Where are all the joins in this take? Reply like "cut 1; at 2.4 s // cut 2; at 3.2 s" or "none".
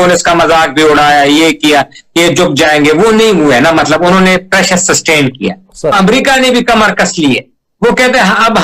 cut 1; at 6.0 s

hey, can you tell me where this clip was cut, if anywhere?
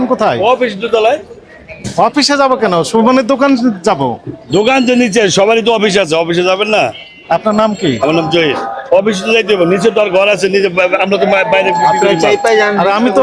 none

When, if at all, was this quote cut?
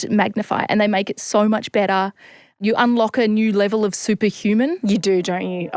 cut 1; at 2.6 s

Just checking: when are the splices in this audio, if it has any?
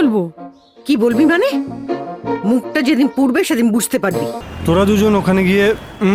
cut 1; at 4.4 s

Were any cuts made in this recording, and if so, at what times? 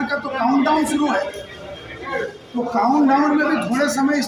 none

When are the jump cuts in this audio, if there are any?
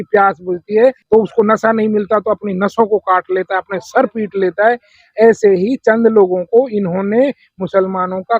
cut 1; at 1.0 s

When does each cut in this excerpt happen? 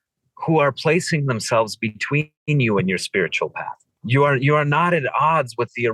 cut 1; at 4.0 s

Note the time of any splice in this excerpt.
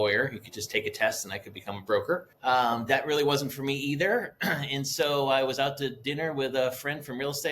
cut 1; at 2.3 s

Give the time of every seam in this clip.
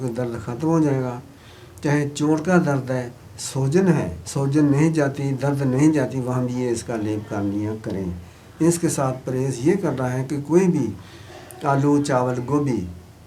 cut 1; at 4.2 s

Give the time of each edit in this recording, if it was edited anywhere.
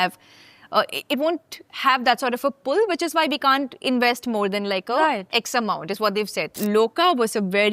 cut 1; at 6.5 s

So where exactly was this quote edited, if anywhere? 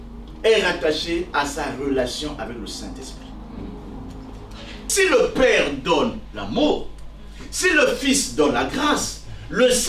cut 1; at 4.9 s

